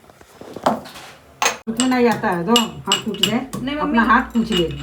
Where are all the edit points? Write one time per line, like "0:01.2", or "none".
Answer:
0:01.6

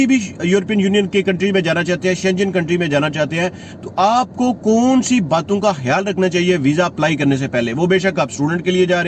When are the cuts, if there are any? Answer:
none

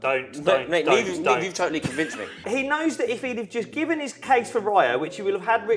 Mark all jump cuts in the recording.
0:02.4

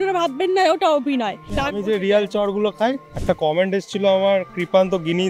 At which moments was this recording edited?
0:01.5
0:03.1

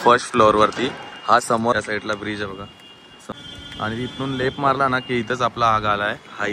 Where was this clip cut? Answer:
0:01.7
0:03.3

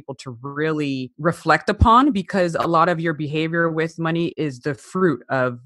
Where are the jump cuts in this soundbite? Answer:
0:01.1
0:04.3

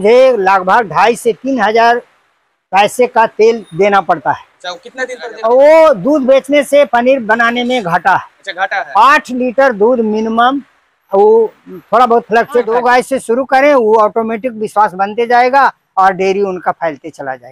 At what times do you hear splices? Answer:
0:05.2
0:12.7

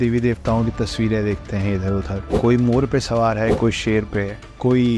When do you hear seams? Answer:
none

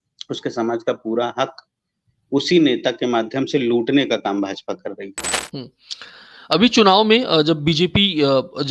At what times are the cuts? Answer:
0:05.3

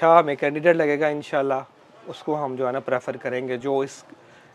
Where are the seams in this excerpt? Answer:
none

